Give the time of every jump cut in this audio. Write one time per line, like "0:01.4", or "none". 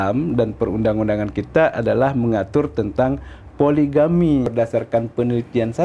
0:04.5